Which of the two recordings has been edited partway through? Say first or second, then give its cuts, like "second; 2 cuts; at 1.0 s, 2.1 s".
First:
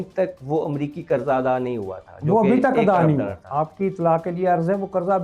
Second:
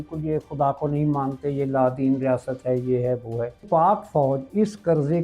second; 1 cut; at 3.6 s